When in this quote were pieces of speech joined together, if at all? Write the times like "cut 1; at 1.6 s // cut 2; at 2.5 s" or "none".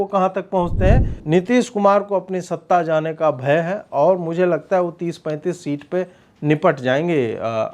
cut 1; at 1.1 s